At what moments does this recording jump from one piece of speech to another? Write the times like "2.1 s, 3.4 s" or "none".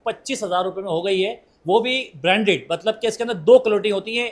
none